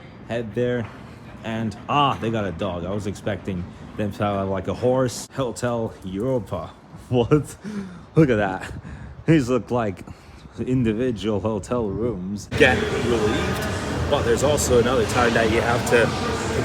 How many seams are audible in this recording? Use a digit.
2